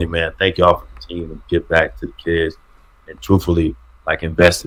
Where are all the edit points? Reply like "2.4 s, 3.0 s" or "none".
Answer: none